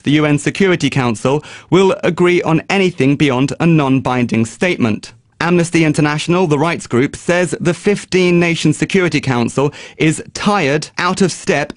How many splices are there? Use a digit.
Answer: 1